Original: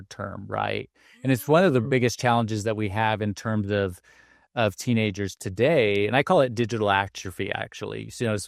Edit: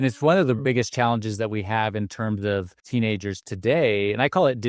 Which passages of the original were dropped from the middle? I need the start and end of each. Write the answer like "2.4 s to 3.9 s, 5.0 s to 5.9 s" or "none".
4.1 s to 4.8 s

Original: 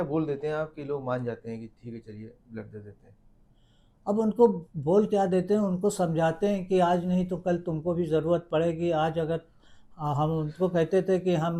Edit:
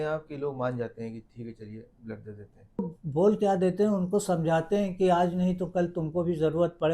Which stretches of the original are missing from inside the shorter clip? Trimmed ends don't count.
3.3 s to 4.5 s

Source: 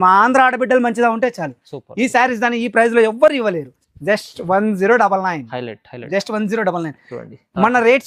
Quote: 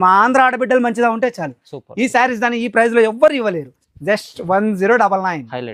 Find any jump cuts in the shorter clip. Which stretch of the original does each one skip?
none

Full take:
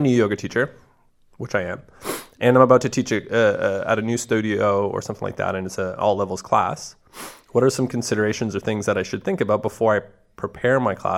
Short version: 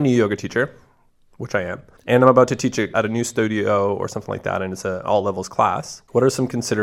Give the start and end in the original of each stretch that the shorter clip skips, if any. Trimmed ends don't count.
1.9 s to 2.3 s, 3.2 s to 3.8 s, 6.9 s to 7.3 s

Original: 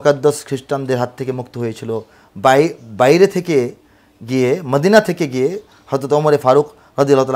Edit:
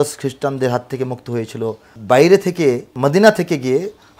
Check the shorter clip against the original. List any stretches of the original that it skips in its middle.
2.2 s to 2.8 s, 3.8 s to 4.6 s

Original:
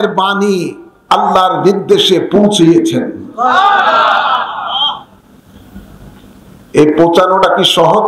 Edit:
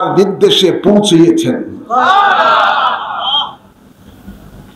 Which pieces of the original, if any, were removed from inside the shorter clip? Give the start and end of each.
none

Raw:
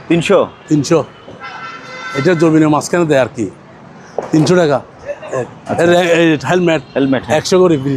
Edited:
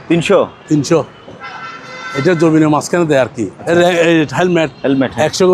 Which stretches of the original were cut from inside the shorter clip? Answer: 3.5 s to 5.6 s

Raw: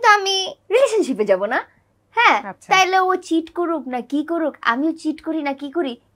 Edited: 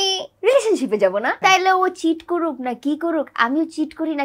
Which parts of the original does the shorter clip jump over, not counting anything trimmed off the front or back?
1.6 s to 2.6 s

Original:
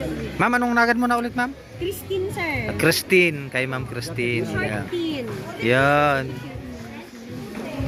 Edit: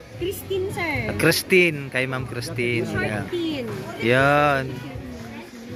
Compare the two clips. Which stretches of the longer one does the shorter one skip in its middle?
none

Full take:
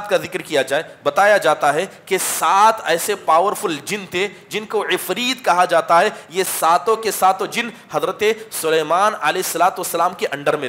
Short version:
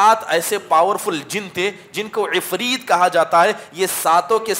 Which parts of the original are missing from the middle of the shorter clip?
none

